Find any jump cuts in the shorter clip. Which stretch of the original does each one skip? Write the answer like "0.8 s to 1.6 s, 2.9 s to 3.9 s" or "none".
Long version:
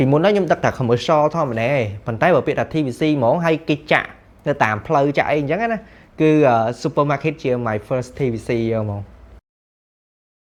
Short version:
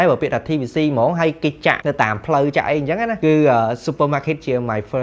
4.0 s to 4.4 s, 5.8 s to 6.1 s